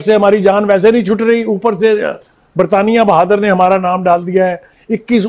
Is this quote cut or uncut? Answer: uncut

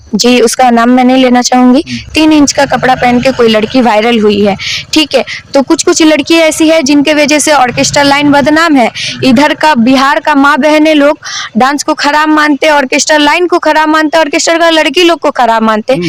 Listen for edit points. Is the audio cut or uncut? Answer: uncut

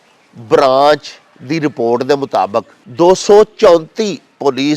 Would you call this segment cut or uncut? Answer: cut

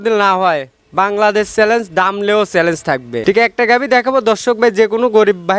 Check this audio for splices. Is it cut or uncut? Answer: cut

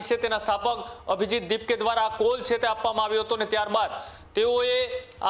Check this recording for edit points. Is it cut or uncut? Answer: uncut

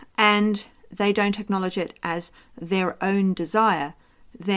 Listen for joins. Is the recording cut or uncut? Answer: uncut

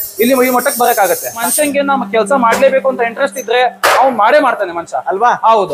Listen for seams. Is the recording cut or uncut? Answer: cut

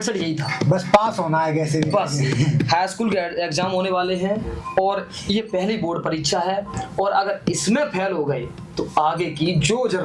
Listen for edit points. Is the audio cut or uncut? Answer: uncut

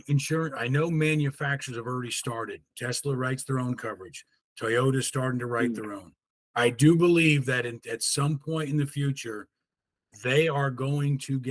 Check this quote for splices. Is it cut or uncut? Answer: uncut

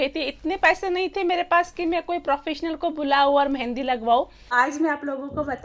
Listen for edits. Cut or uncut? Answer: cut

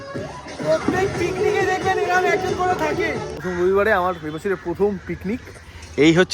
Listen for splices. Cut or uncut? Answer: cut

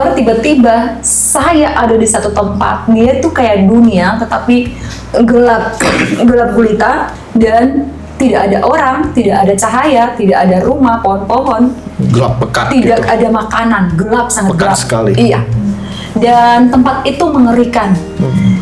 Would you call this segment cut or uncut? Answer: cut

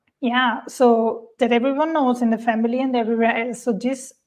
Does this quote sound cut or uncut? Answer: uncut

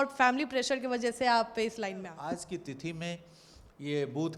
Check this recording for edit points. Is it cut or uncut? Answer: cut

